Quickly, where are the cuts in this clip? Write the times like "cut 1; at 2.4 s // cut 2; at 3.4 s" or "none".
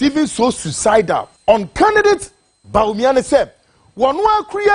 cut 1; at 1.3 s